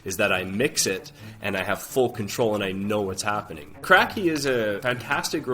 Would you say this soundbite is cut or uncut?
cut